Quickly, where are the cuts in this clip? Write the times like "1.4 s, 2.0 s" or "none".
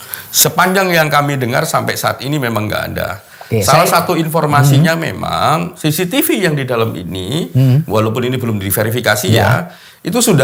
none